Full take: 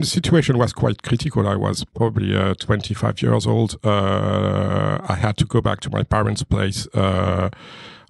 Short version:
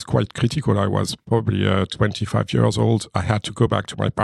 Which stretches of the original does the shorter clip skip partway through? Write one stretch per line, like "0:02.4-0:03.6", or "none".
0:03.8-0:05.0